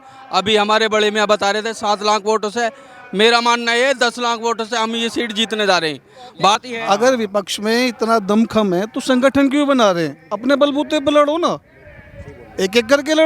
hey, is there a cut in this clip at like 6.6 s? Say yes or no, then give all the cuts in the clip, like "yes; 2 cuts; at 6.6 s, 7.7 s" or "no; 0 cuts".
yes; 1 cut; at 6.6 s